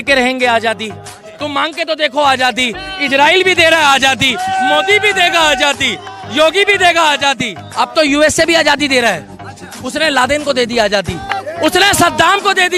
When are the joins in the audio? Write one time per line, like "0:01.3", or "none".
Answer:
0:07.6
0:11.4

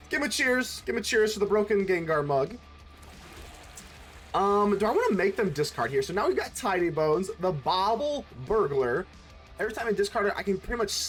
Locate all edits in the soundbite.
none

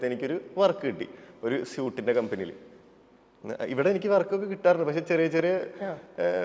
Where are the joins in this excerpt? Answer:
none

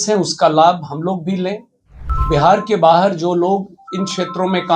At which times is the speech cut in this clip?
0:02.1

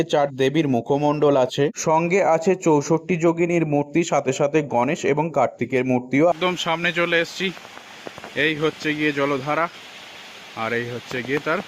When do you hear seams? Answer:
0:06.3

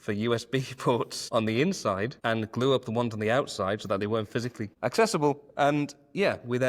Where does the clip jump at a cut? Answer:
0:01.2
0:02.1
0:04.7

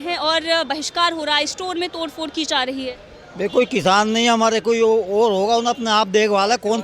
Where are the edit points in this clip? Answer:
none

